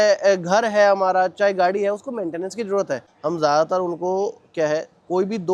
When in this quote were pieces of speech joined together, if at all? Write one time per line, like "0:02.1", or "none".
0:03.1